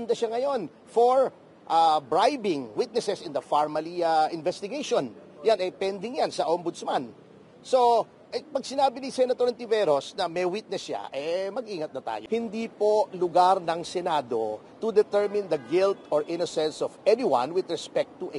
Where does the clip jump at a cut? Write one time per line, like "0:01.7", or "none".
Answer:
0:12.1